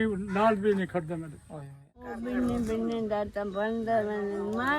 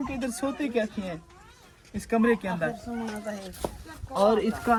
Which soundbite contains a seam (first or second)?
first